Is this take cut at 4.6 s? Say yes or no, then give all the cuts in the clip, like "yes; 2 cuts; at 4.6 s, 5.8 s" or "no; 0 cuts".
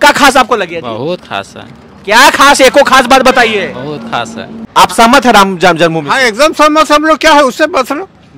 yes; 1 cut; at 4.6 s